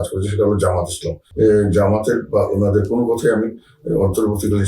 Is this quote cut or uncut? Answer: cut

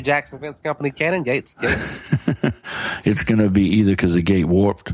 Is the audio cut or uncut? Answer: uncut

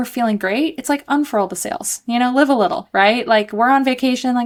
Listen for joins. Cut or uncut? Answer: uncut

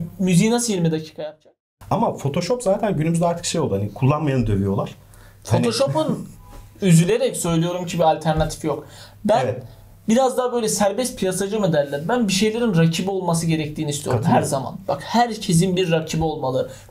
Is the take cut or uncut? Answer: cut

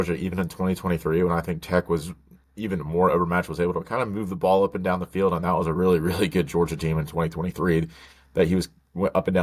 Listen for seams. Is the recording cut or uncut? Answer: uncut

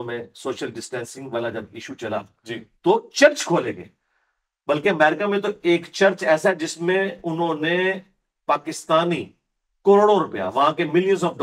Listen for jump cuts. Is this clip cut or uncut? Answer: uncut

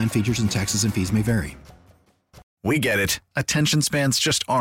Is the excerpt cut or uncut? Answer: cut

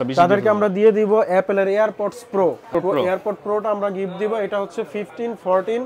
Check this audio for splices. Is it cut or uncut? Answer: cut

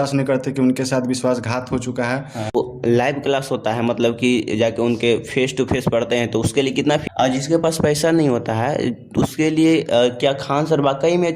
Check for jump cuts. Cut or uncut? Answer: cut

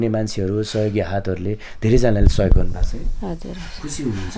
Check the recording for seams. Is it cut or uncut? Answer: uncut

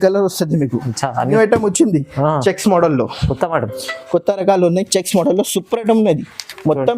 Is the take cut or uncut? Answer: cut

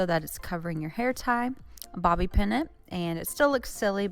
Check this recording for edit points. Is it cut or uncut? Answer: cut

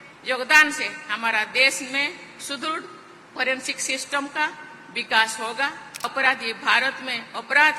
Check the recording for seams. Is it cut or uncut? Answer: cut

